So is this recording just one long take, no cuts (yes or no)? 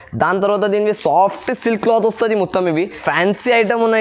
no